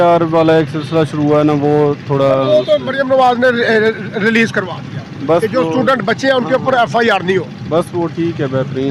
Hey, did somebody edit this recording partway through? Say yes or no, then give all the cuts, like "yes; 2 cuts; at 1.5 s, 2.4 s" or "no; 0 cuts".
no; 0 cuts